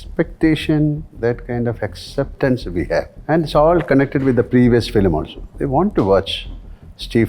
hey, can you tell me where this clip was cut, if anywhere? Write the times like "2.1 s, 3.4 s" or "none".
3.2 s